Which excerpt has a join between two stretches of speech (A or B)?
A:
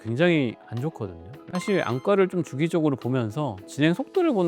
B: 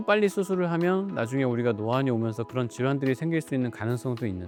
A